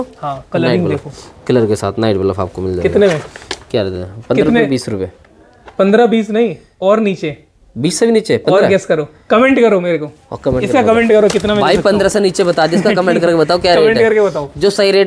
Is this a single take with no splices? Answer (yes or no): yes